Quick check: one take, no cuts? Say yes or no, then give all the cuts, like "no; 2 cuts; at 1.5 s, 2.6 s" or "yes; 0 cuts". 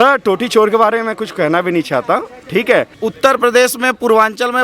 no; 1 cut; at 2.9 s